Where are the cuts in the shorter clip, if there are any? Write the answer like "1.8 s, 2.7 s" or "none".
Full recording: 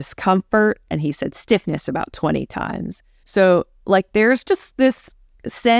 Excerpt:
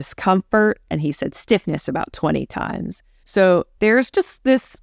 3.7 s